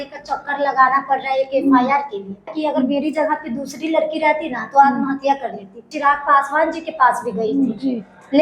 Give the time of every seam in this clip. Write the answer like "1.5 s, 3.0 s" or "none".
2.5 s, 5.8 s